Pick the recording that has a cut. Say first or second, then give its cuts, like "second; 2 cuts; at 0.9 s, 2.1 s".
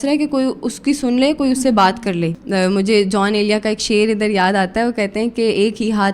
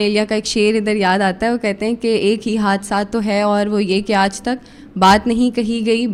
first; 1 cut; at 2.4 s